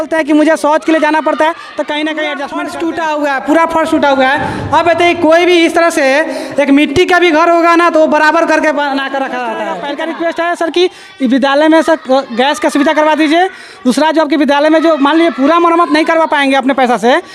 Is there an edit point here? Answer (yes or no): yes